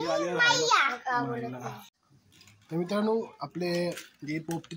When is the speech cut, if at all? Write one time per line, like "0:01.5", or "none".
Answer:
0:01.9